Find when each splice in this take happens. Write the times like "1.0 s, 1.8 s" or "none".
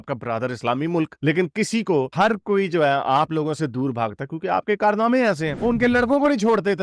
5.6 s